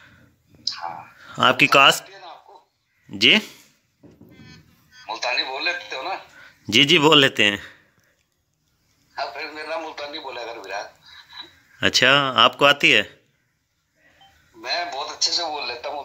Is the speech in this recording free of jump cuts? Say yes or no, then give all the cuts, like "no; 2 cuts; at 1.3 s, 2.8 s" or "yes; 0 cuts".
yes; 0 cuts